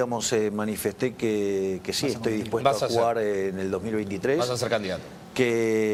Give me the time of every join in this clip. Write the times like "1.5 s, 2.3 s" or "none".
none